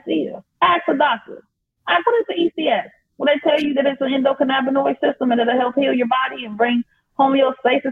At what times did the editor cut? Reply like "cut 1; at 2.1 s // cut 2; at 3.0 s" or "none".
none